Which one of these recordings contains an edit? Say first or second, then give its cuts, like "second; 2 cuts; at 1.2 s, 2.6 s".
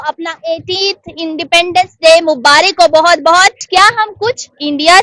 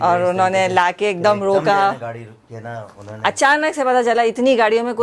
first; 1 cut; at 3.6 s